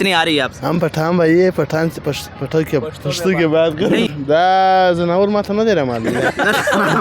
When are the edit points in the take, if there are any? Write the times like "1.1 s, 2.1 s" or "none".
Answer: 4.2 s